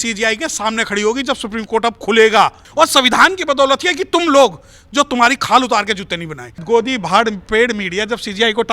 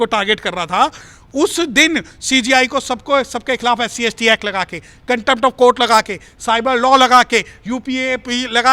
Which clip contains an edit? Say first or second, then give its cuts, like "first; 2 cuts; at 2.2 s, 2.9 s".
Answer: first; 2 cuts; at 2.6 s, 6.5 s